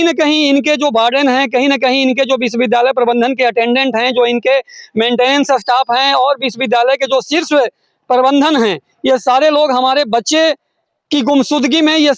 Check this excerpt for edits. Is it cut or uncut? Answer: uncut